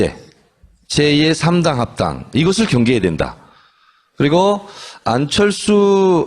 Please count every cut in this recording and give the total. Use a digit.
1